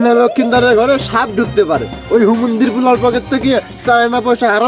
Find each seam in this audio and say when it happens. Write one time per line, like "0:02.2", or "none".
none